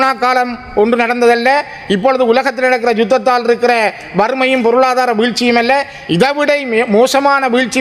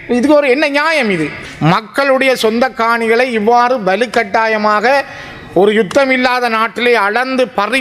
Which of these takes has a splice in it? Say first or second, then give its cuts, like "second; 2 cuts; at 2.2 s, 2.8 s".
second; 1 cut; at 1.4 s